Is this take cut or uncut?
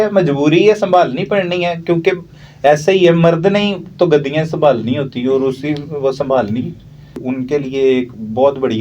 cut